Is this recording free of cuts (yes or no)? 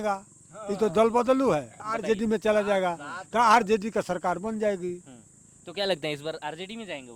no